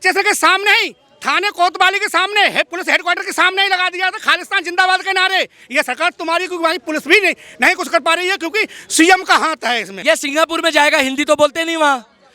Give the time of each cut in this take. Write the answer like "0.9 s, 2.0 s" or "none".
9.9 s

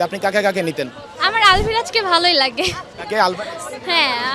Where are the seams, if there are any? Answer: 1.0 s

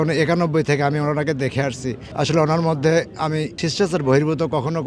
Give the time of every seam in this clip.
2.0 s, 3.6 s

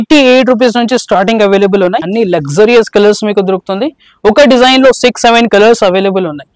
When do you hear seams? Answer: 2.1 s

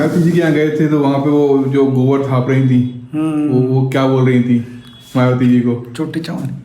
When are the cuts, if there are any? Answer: none

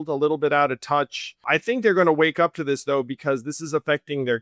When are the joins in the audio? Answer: 1.4 s

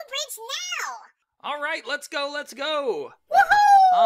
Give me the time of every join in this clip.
3.2 s

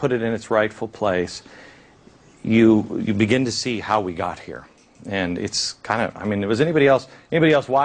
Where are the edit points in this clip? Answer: 3.3 s

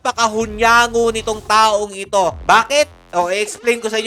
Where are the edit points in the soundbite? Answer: none

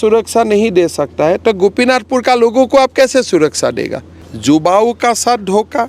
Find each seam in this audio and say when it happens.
4.3 s

